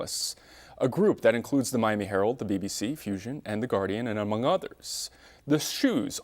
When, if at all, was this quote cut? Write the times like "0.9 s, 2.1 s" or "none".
3.5 s